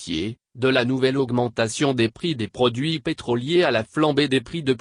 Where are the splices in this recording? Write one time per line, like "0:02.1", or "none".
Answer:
0:03.7

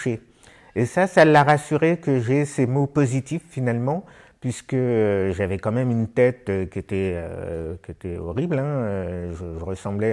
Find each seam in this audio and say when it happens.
none

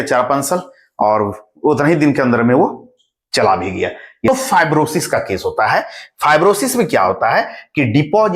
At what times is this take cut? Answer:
0:04.3

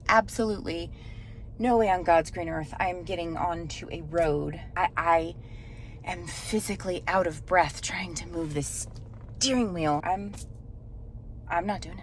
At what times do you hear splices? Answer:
0:04.7
0:10.0

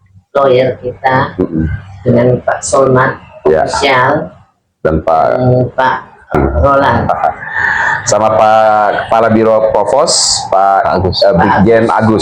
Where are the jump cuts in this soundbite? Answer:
0:06.3

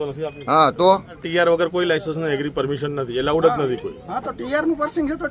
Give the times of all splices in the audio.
0:01.2

